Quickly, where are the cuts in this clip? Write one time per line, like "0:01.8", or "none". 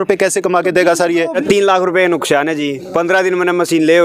0:01.4